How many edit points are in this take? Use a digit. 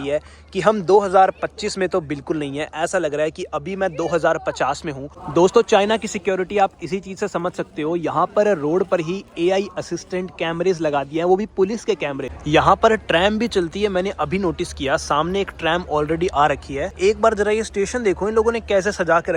3